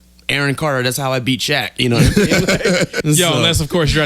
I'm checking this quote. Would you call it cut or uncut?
cut